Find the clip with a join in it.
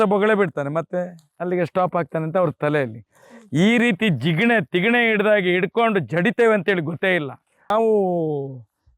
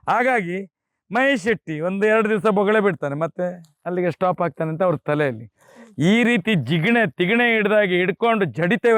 first; 1 cut; at 7.7 s

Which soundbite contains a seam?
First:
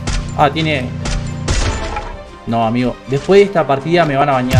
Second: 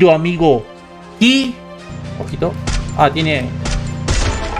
second; 1 cut; at 1.7 s

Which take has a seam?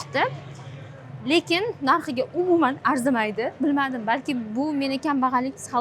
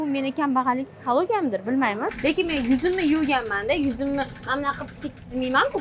second; 1 cut; at 2.0 s

